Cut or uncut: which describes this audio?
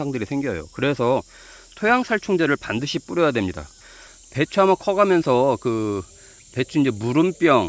cut